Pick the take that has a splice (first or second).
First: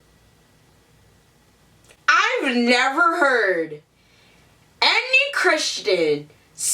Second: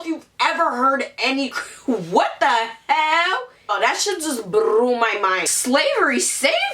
second